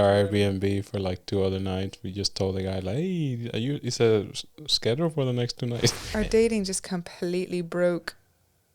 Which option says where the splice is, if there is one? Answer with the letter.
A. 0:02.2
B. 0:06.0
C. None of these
B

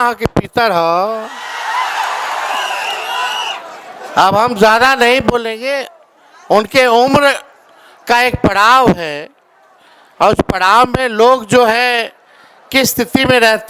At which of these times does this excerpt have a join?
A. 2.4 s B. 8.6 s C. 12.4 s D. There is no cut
D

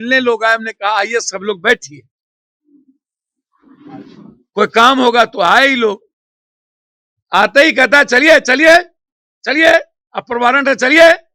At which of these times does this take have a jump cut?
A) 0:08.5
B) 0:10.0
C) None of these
C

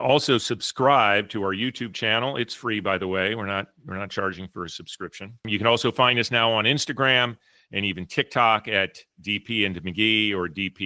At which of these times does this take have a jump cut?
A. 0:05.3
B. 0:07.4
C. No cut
A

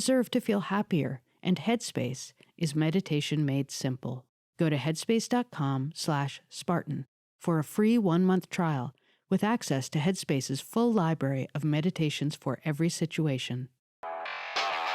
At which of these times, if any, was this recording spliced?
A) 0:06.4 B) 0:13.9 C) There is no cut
B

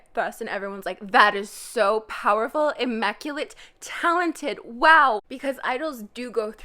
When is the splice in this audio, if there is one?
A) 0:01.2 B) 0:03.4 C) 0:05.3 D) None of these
C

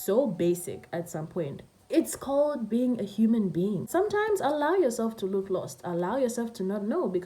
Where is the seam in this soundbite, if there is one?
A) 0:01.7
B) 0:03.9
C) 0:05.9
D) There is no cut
B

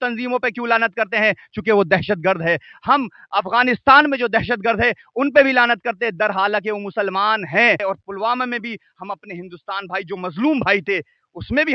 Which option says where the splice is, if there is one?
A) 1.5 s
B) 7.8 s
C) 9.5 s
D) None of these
B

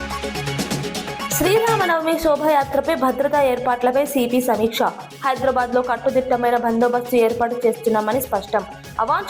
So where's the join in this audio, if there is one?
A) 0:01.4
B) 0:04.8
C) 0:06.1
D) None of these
A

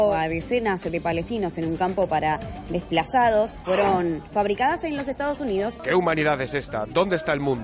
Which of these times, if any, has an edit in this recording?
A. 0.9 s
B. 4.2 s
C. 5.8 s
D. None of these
C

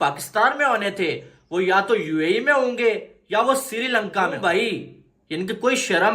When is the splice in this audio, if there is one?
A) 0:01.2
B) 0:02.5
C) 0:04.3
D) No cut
C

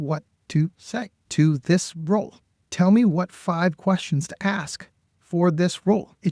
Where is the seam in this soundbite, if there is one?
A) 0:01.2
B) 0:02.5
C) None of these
A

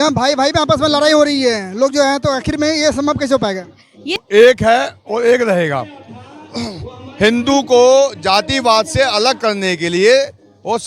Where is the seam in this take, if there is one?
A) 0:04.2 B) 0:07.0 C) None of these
A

